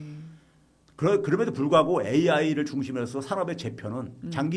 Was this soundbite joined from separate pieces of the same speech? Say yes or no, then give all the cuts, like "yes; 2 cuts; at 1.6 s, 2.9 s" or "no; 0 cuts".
no; 0 cuts